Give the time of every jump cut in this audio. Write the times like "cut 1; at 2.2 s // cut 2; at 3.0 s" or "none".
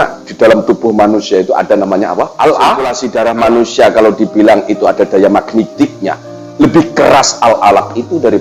cut 1; at 3.0 s